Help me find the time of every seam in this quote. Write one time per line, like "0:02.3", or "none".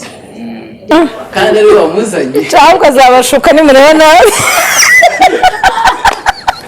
0:00.9